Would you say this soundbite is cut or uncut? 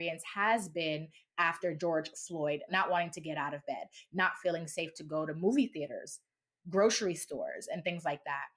cut